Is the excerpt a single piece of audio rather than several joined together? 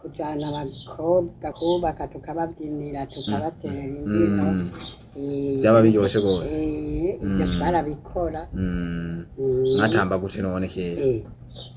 no; 1 cut; at 1.5 s

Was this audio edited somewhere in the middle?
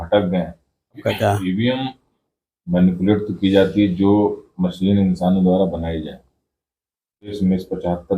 yes; 2 cuts; at 1.0 s, 7.4 s

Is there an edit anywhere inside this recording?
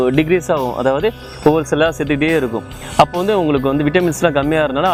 no; 0 cuts

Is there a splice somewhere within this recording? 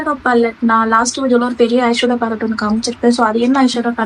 no; 0 cuts

